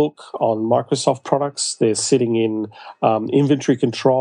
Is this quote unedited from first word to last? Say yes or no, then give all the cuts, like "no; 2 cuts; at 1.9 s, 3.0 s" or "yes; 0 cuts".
yes; 0 cuts